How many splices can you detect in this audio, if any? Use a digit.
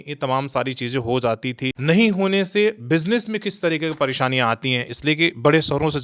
1